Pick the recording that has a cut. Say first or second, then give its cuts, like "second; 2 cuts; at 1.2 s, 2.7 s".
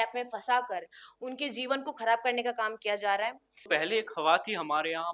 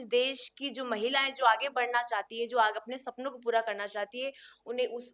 first; 1 cut; at 3.5 s